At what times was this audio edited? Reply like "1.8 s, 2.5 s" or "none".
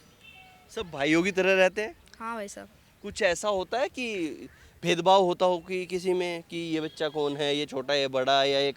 none